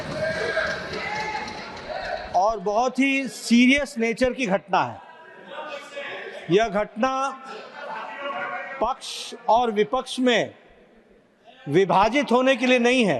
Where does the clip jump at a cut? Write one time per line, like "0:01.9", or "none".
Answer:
none

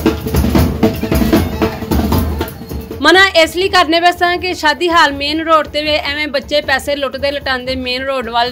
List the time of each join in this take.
none

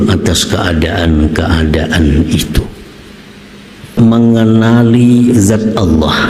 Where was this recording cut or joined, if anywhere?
0:04.0

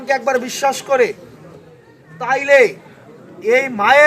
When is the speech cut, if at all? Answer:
none

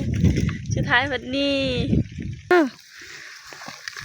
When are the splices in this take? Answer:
0:02.5

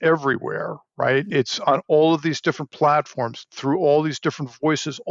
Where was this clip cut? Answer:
0:01.3

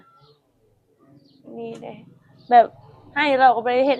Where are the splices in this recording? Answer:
none

